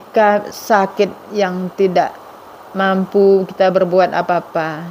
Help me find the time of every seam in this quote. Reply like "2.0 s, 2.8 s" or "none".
none